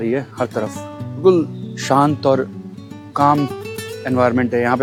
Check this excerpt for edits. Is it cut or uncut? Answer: uncut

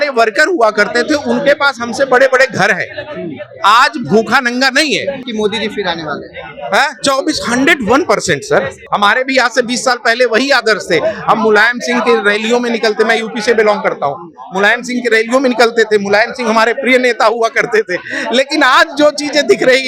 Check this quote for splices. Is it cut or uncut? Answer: cut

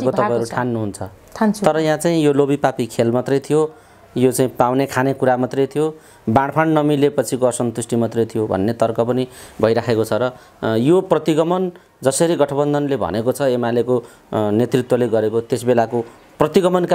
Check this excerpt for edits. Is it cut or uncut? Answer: uncut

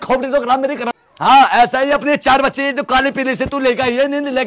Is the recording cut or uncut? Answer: cut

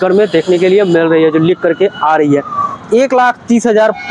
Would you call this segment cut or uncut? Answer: cut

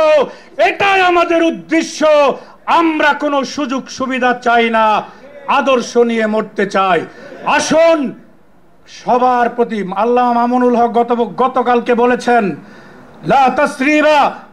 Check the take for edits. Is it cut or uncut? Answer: uncut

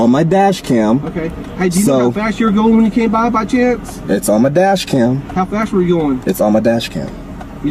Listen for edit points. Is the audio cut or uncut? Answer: uncut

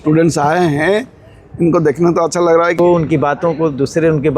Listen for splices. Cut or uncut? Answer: cut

